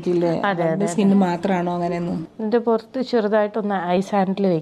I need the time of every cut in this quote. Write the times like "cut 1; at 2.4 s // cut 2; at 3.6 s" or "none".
cut 1; at 2.3 s

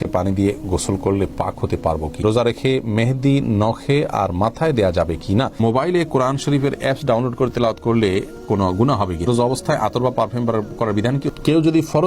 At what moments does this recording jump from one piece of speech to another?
cut 1; at 2.2 s // cut 2; at 5.6 s // cut 3; at 9.2 s // cut 4; at 11.3 s

